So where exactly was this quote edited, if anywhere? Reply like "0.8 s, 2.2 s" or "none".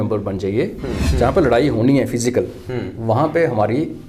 1.1 s